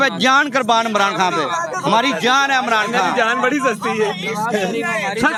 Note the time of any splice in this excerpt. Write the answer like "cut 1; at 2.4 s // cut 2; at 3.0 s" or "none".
none